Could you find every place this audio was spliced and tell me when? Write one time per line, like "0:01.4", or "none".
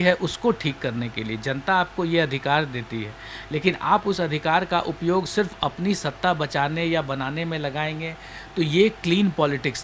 none